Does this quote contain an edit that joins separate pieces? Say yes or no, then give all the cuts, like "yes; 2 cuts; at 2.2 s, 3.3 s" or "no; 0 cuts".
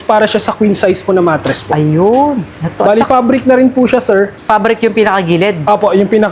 no; 0 cuts